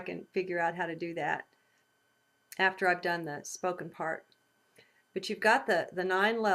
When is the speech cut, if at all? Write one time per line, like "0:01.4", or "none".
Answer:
0:05.0